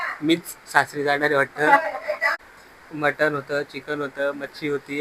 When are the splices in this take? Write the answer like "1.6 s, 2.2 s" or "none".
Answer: 2.3 s

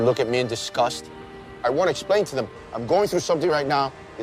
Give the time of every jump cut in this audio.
1.6 s

